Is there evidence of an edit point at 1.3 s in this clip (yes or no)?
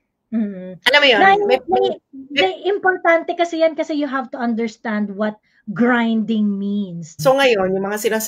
no